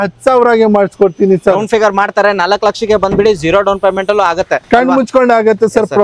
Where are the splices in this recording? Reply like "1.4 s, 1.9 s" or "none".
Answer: none

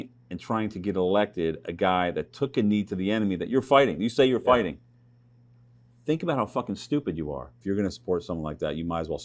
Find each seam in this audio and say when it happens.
7.6 s

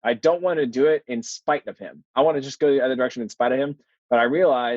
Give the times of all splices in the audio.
2.1 s

